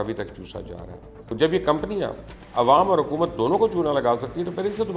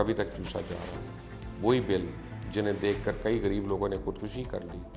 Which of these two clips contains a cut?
first; 1 cut; at 1.2 s

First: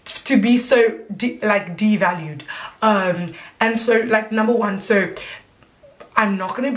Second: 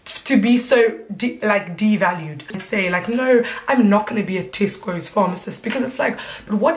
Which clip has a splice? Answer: second; 1 cut; at 2.6 s

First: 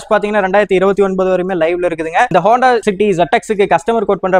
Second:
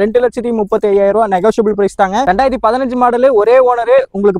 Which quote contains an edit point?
second; 1 cut; at 2.2 s

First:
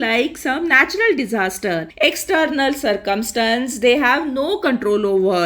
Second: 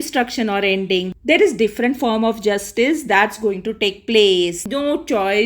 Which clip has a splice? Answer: second; 2 cuts; at 1.1 s, 4.7 s

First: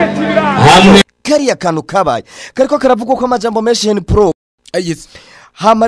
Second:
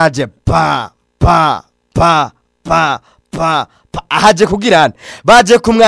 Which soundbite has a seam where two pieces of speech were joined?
first; 1 cut; at 4.4 s

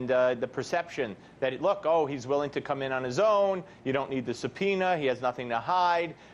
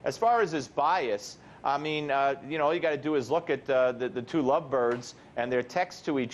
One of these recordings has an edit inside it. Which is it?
second; 1 cut; at 3.2 s

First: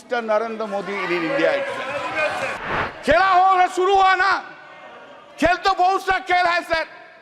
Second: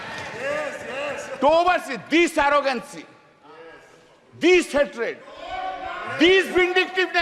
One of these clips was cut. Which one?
first; 1 cut; at 2.6 s

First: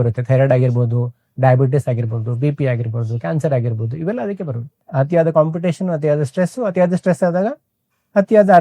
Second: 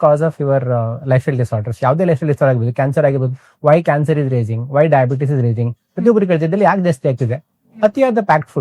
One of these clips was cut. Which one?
first; 1 cut; at 4.8 s

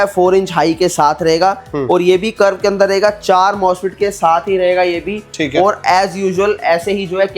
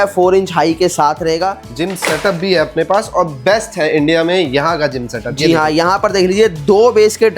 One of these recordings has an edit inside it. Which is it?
second; 1 cut; at 1.6 s

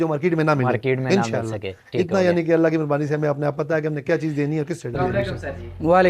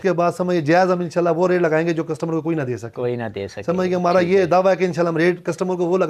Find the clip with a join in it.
first; 1 cut; at 5.1 s

